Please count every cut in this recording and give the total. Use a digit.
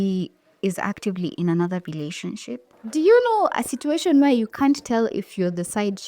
1